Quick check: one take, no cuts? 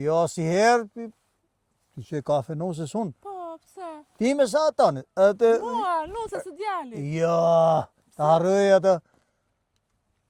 yes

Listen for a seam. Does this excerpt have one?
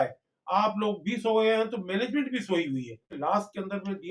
yes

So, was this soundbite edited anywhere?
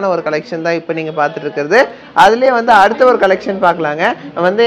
no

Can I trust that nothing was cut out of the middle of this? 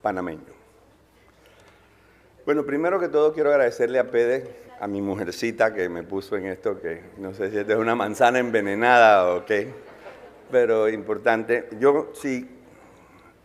no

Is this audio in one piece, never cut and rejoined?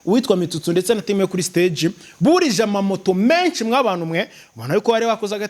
yes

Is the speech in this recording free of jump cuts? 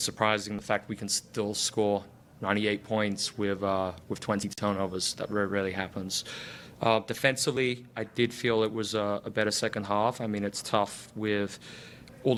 yes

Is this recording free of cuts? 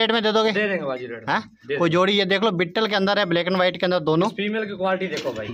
yes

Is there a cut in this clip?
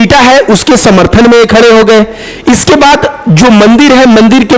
no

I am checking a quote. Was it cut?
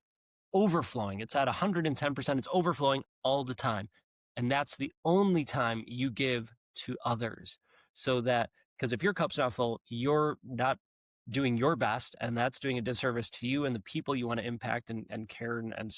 no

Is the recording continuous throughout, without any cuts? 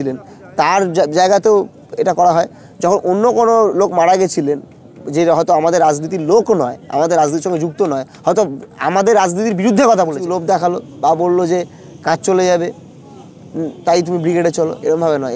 no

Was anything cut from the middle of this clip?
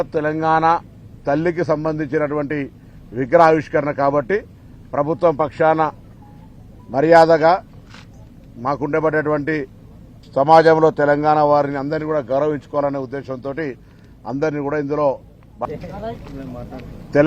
yes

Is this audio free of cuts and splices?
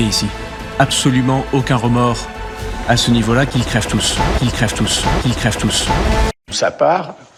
yes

